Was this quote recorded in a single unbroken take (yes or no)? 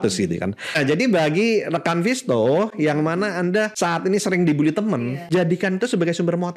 no